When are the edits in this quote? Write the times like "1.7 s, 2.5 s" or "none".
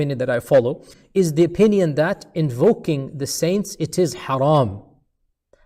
0.9 s